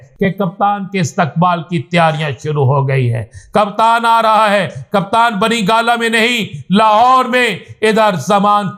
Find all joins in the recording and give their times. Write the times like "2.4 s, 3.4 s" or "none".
none